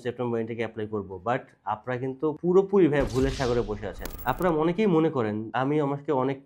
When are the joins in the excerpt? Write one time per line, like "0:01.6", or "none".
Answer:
0:02.4
0:04.1
0:05.4